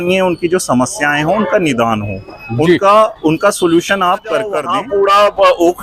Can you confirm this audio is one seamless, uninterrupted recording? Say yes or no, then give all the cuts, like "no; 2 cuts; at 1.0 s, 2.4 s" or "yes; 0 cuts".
no; 1 cut; at 4.7 s